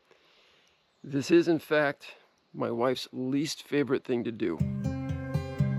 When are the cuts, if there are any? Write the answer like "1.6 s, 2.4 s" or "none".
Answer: 4.6 s